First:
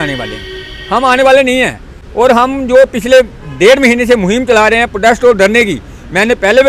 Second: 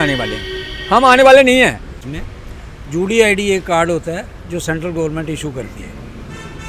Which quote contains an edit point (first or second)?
second